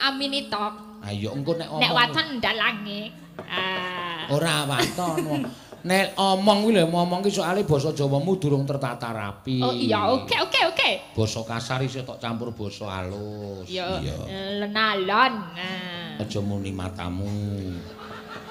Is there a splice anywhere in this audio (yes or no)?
no